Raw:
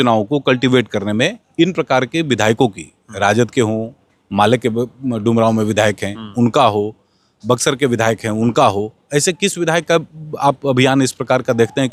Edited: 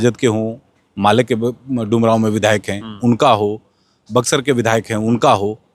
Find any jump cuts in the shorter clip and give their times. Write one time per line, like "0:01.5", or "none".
none